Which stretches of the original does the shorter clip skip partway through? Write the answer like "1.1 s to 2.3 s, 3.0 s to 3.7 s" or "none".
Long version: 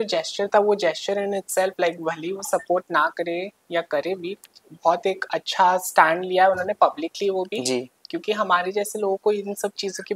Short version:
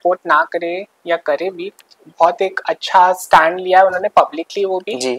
none